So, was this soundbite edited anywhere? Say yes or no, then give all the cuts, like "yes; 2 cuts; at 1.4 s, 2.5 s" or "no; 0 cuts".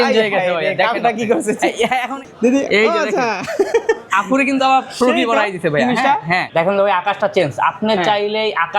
yes; 2 cuts; at 2.2 s, 6.5 s